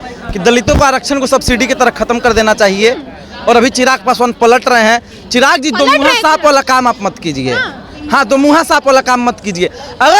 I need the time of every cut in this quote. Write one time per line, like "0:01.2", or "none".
none